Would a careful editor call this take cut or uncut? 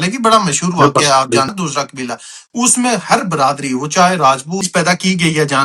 cut